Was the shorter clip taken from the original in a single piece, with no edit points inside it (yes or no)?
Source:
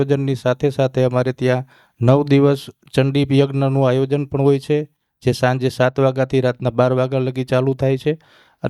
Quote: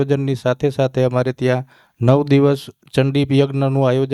yes